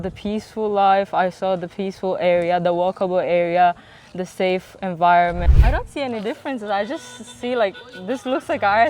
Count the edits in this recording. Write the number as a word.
one